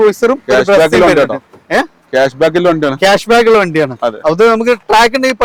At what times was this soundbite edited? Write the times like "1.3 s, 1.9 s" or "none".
none